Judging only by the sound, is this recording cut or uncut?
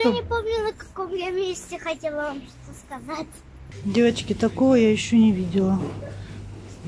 cut